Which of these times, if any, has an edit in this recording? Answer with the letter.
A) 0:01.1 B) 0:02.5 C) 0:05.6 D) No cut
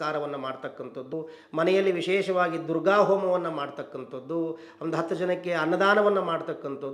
A